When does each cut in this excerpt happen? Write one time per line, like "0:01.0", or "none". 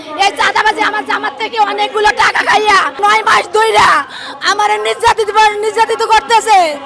0:03.0